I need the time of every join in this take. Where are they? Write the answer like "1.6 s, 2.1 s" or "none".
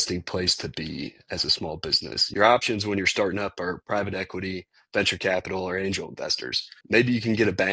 2.1 s, 6.8 s